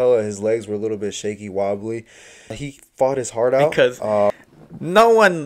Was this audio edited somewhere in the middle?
yes; 2 cuts; at 2.6 s, 4.3 s

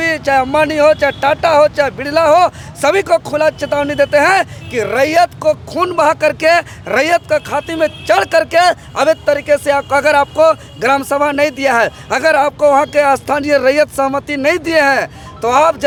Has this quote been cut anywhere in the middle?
no; 0 cuts

